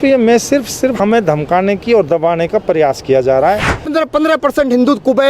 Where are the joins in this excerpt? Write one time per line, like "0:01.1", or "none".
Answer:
0:00.9
0:03.9